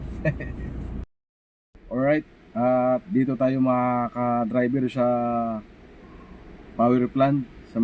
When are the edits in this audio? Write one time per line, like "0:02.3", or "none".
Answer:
0:01.1